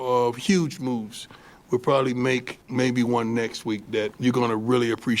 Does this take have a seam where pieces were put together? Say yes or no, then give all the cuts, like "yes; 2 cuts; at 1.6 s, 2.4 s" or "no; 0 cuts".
yes; 2 cuts; at 2.6 s, 4.1 s